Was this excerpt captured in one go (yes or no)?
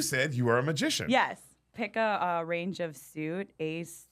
no